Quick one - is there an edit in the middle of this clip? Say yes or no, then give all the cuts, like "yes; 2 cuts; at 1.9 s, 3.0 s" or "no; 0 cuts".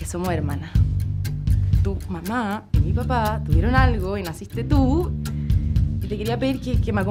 no; 0 cuts